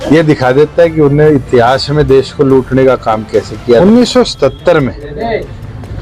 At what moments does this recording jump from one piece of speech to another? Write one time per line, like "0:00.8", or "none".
0:03.8